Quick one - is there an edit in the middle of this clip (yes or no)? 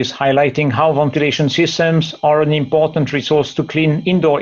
no